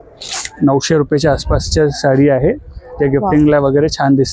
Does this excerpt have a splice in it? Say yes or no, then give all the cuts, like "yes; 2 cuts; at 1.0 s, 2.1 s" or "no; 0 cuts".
no; 0 cuts